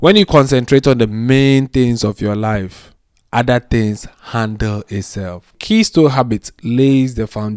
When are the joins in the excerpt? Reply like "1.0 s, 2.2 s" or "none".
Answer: 5.6 s

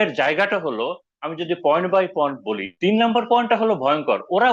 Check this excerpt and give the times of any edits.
2.7 s

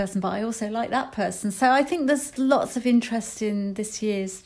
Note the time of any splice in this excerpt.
2.3 s

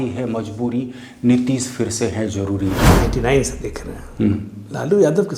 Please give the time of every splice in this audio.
2.9 s

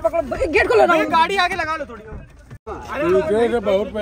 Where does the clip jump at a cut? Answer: 2.6 s

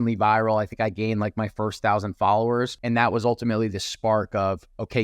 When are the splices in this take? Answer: 2.8 s

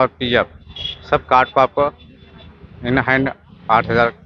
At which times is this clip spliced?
none

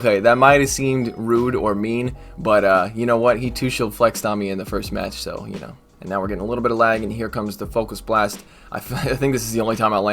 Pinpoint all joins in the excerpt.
5.7 s

